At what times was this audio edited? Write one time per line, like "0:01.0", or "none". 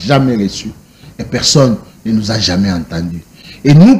none

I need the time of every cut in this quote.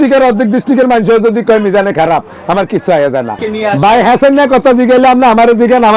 0:03.4

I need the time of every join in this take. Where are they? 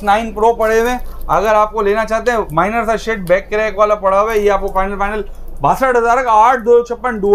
none

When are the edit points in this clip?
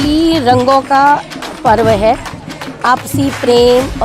none

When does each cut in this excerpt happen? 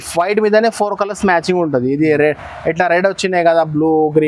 none

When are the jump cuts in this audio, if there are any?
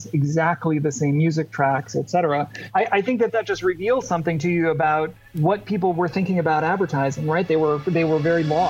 0:02.6
0:05.2

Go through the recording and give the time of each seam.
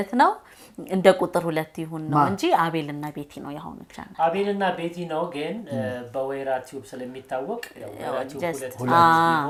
none

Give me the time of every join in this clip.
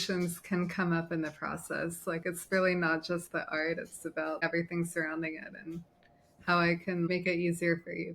0:04.4
0:07.1

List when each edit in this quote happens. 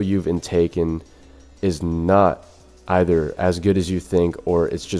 none

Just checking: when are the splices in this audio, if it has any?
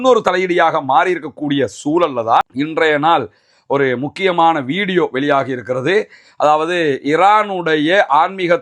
0:02.5

